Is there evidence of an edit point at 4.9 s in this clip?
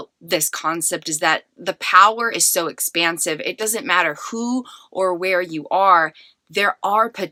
no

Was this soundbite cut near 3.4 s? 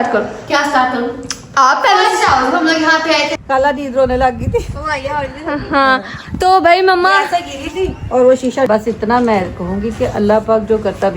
yes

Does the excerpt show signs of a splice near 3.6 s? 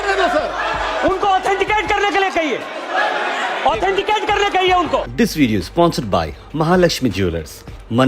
no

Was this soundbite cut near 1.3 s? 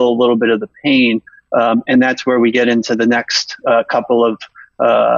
no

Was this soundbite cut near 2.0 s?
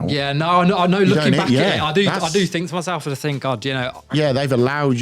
no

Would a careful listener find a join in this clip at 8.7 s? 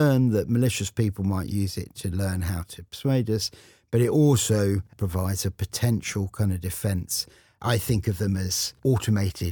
yes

